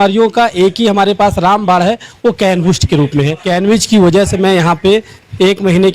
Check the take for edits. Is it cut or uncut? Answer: cut